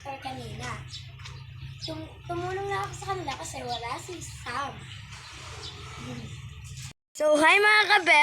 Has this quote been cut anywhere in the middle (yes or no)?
yes